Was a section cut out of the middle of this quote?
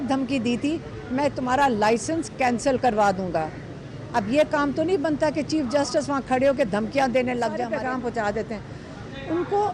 yes; 1 cut; at 7.6 s

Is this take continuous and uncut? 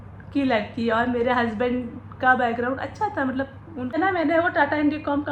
no; 1 cut; at 4.0 s

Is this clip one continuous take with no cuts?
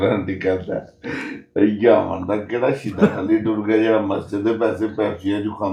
yes; 0 cuts

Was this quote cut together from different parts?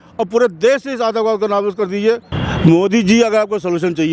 yes; 1 cut; at 2.3 s

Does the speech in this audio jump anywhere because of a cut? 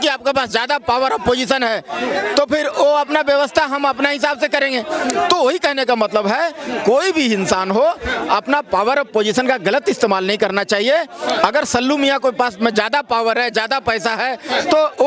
no; 0 cuts

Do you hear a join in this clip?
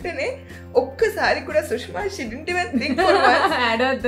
no; 0 cuts

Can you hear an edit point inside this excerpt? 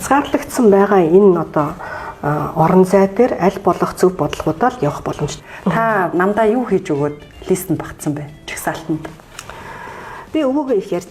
yes; 2 cuts; at 5.3 s, 9.1 s

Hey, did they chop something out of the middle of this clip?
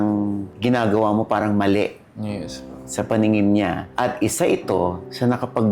no; 0 cuts

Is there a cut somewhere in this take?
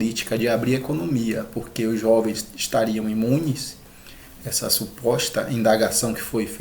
no; 0 cuts

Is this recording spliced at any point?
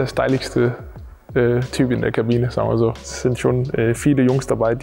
yes; 1 cut; at 3.1 s

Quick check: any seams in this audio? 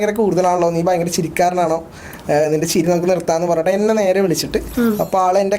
yes; 1 cut; at 4.7 s

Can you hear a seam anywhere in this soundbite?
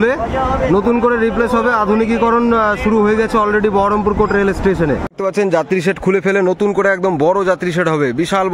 yes; 1 cut; at 5.1 s

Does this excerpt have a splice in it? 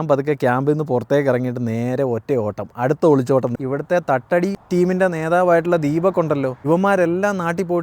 yes; 1 cut; at 3.6 s

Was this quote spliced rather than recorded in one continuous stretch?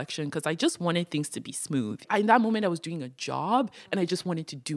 yes; 1 cut; at 2.0 s

